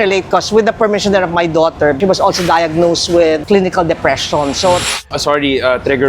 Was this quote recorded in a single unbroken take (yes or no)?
no